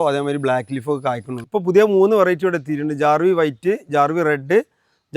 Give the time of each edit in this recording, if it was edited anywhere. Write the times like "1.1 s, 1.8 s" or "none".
1.4 s